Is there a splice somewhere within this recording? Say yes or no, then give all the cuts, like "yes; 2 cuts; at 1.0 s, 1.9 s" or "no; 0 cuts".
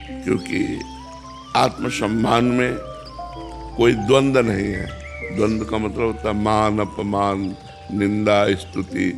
no; 0 cuts